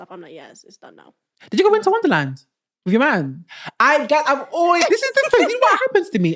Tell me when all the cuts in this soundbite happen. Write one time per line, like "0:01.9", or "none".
0:01.3